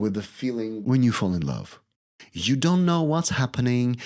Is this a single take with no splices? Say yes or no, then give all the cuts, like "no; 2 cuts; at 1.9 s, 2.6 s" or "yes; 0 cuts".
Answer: no; 2 cuts; at 0.8 s, 1.8 s